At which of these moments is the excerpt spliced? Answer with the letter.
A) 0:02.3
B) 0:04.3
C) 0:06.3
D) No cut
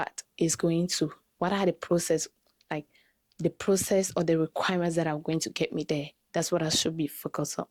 D